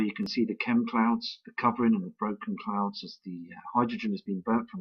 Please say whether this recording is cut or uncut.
cut